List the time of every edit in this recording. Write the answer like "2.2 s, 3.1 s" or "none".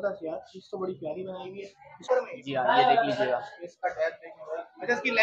2.1 s